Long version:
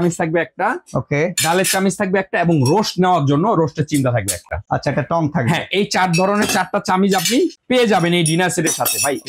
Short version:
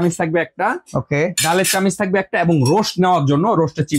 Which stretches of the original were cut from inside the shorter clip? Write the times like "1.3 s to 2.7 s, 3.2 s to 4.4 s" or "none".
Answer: none